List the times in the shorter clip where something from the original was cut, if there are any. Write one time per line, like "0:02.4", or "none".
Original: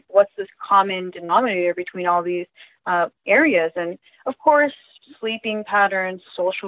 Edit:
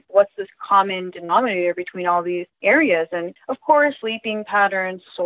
0:02.5
0:03.4
0:04.0